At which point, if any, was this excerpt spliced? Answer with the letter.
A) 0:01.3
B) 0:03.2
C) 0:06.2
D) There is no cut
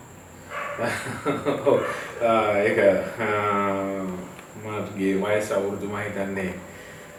D